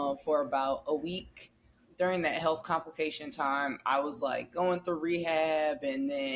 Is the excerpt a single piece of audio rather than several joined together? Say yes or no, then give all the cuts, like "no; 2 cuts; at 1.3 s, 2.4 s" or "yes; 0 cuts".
no; 1 cut; at 1.8 s